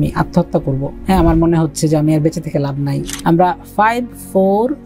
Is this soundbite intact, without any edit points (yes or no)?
no